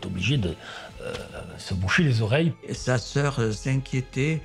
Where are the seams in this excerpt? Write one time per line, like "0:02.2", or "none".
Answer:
0:02.6